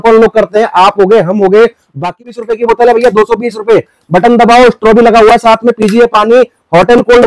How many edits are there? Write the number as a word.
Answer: one